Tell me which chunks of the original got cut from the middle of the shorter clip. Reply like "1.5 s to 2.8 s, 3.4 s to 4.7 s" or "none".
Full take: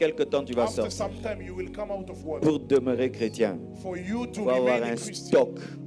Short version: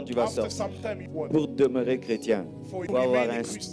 1.4 s to 2.2 s, 3.9 s to 4.4 s